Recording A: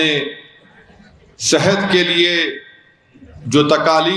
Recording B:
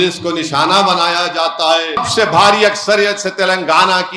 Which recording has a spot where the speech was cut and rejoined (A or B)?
B